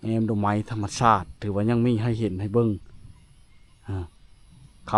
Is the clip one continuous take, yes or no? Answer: yes